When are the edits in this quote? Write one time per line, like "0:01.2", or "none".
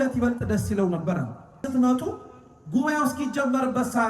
0:01.7